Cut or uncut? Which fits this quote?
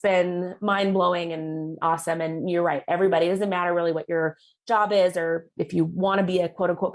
uncut